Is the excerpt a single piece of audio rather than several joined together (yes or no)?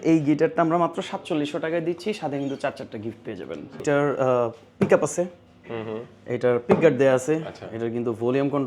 no